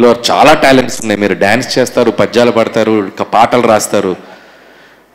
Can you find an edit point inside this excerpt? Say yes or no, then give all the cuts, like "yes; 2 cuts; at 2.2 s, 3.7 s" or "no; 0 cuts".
no; 0 cuts